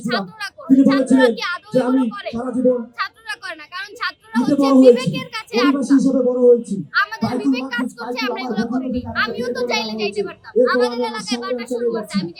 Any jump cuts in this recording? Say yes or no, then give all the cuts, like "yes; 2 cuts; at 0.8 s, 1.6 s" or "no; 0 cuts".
no; 0 cuts